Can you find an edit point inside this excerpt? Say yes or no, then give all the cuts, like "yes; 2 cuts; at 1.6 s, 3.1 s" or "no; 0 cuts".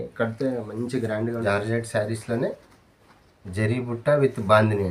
yes; 1 cut; at 1.4 s